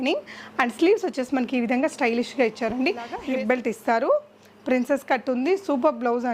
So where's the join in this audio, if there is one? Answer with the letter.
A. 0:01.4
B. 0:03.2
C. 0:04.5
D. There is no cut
B